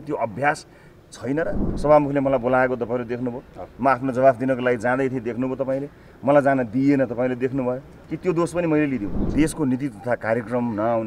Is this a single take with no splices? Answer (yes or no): no